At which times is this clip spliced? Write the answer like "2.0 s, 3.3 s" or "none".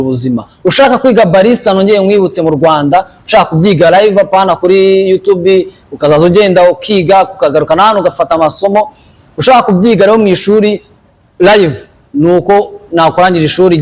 none